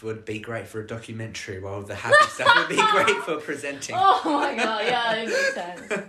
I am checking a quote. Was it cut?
no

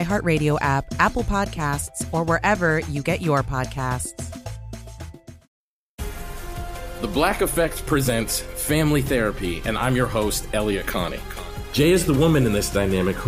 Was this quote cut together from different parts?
yes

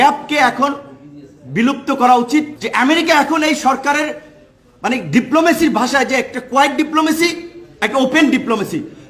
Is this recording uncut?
no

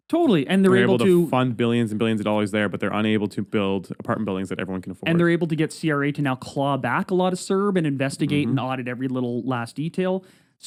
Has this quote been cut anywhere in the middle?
no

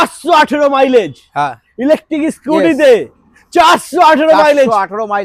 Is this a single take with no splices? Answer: yes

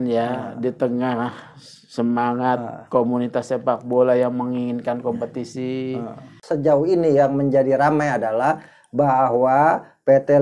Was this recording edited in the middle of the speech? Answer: yes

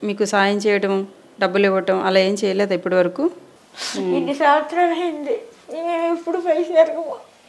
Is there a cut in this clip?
yes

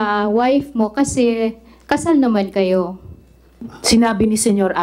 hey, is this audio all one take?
yes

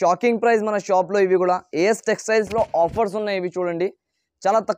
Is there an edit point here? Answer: no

